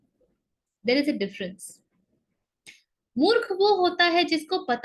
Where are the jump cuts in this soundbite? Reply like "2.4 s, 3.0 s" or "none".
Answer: none